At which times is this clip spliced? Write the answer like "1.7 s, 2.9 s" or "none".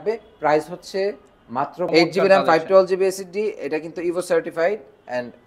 1.9 s